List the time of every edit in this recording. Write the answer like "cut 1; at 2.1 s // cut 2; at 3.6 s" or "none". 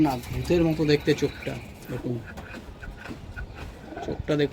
none